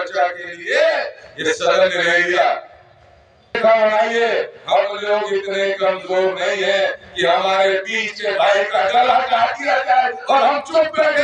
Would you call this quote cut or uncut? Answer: cut